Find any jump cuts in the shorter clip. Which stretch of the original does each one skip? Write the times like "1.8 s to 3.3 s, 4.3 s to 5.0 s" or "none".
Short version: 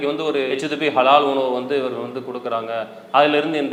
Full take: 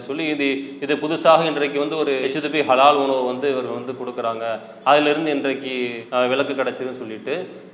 none